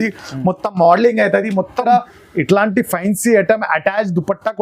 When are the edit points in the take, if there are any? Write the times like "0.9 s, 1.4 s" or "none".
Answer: 1.9 s